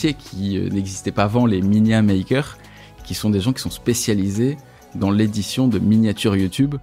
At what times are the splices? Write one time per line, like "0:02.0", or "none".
none